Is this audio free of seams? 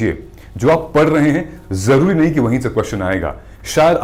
yes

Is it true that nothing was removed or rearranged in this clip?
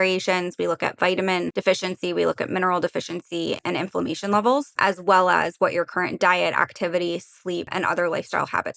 no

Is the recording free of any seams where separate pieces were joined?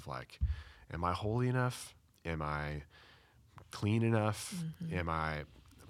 yes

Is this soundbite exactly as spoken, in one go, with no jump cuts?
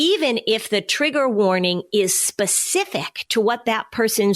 no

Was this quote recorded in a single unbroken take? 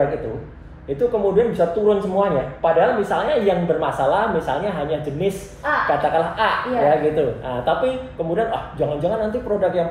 yes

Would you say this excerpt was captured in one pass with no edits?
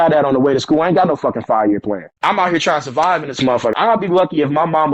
no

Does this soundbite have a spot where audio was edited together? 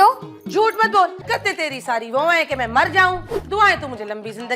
yes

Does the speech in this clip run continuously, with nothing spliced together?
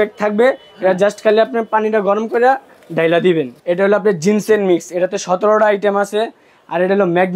no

